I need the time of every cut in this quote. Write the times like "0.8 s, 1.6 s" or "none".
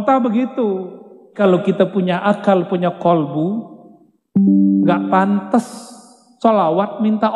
1.4 s